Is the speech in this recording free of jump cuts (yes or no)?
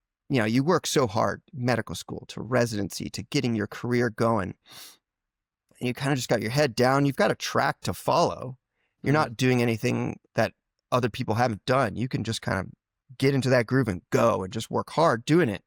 yes